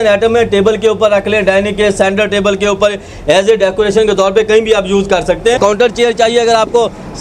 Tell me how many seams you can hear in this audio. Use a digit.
1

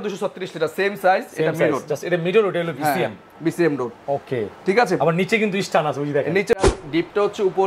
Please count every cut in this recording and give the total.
1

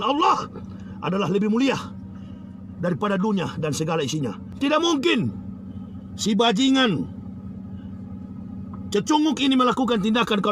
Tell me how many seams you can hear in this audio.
1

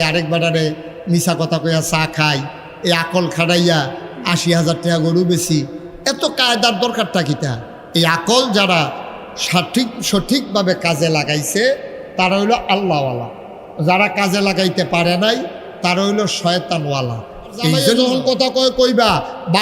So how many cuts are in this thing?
1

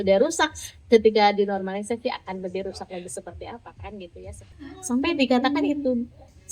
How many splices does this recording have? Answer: 1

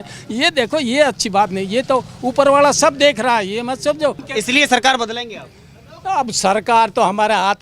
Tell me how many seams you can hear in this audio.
1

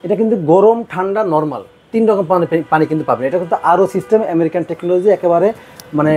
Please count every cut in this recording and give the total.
0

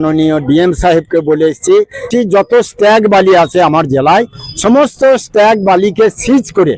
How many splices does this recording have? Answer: 1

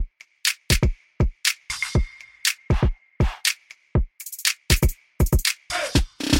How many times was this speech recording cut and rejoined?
1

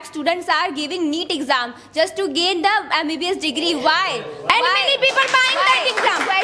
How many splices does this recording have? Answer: 0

